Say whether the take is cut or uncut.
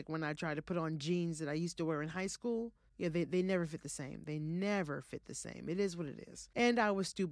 cut